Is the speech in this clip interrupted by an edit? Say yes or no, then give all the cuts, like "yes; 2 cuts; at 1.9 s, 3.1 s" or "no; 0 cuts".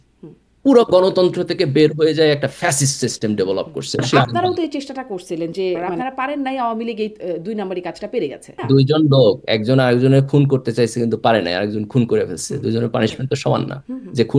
yes; 3 cuts; at 4.1 s, 5.9 s, 8.6 s